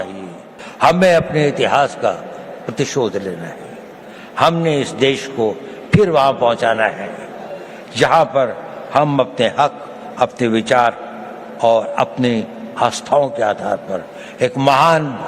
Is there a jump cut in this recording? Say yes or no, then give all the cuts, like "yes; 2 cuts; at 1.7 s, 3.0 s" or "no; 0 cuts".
yes; 1 cut; at 9.5 s